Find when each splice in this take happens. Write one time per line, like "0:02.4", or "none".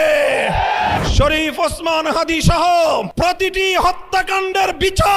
0:01.0
0:03.1